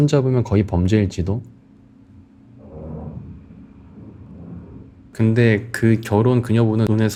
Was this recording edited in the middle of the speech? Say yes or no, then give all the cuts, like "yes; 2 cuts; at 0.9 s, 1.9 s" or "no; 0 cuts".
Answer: no; 0 cuts